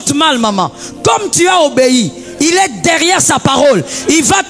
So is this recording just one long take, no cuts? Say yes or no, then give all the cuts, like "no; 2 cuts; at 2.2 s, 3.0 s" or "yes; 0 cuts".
yes; 0 cuts